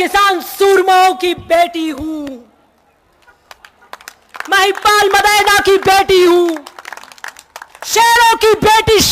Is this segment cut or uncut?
uncut